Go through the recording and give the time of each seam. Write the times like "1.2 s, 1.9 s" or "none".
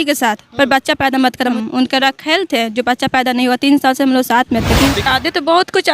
1.5 s, 5.1 s